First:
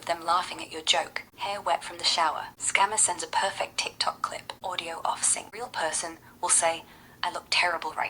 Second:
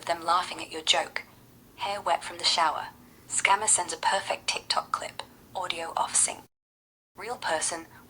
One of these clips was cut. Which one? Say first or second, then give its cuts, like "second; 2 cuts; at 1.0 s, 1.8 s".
first; 4 cuts; at 1.2 s, 2.5 s, 4.5 s, 5.4 s